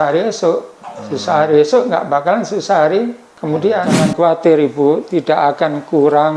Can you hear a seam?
yes; 1 cut; at 4.0 s

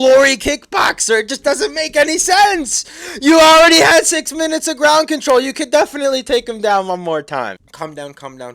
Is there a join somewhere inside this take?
yes; 1 cut; at 7.6 s

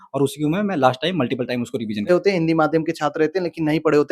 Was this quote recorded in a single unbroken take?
no; 1 cut; at 2.1 s

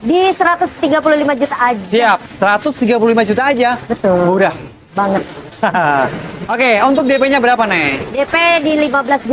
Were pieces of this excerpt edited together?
no; 0 cuts

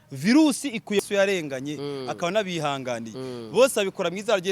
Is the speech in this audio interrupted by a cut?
yes; 1 cut; at 1.0 s

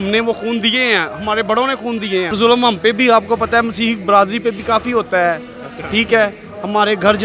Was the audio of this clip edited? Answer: yes; 1 cut; at 2.3 s

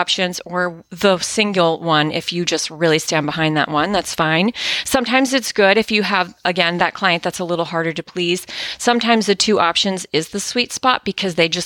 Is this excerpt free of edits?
yes; 0 cuts

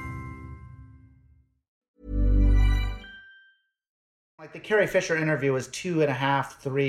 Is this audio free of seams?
no; 2 cuts; at 1.8 s, 4.1 s

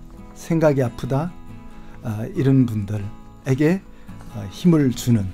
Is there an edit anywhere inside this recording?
no; 0 cuts

